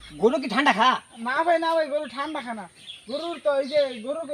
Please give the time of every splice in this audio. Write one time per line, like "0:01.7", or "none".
none